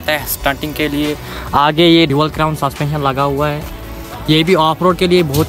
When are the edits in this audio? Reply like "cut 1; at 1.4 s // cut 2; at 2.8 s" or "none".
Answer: none